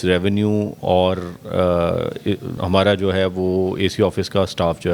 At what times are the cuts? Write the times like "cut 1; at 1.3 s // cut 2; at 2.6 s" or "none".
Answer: cut 1; at 2.5 s